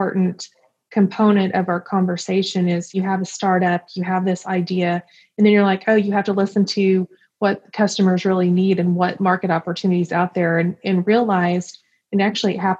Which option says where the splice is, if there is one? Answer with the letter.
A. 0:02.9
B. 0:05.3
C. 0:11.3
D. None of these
A